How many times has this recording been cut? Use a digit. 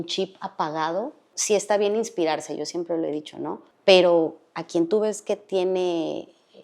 2